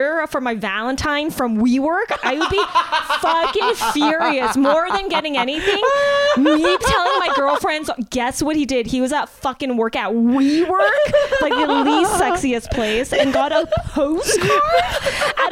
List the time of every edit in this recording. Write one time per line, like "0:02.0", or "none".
none